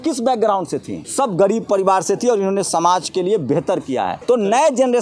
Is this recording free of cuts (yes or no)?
no